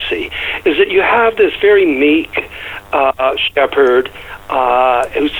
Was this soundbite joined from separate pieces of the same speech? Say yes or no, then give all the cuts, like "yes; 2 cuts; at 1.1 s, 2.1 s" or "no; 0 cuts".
no; 0 cuts